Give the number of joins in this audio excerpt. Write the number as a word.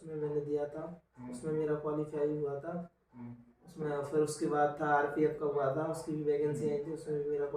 zero